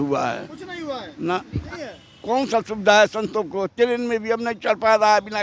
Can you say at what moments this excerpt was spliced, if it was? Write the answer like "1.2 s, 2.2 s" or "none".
1.7 s